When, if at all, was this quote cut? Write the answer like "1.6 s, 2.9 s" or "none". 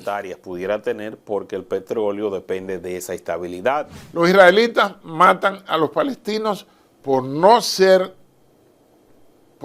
4.0 s